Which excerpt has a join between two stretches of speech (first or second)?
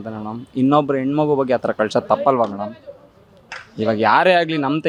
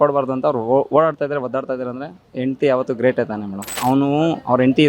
second